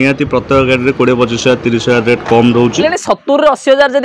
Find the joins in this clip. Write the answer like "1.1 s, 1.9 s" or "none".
2.8 s

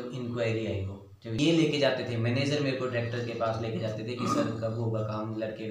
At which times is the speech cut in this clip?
1.4 s

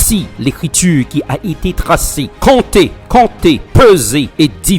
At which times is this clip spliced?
none

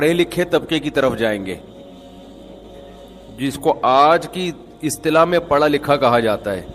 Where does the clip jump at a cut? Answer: none

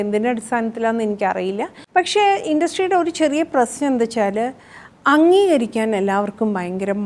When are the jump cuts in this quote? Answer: 1.7 s

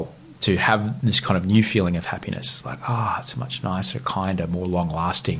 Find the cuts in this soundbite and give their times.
none

